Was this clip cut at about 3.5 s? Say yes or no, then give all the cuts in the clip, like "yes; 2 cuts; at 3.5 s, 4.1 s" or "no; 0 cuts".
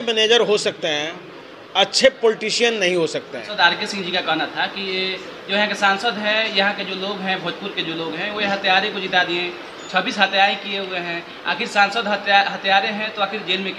yes; 1 cut; at 3.5 s